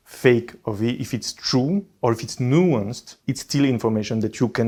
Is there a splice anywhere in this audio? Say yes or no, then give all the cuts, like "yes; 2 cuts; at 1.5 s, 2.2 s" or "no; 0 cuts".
no; 0 cuts